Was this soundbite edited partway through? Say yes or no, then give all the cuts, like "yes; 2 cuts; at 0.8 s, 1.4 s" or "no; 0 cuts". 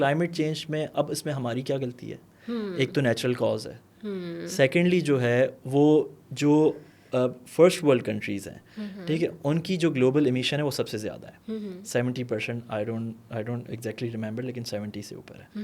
no; 0 cuts